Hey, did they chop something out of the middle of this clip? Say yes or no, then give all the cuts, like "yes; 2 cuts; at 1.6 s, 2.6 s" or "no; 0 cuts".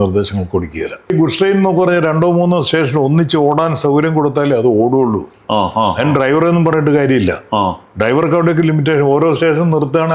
yes; 1 cut; at 1.1 s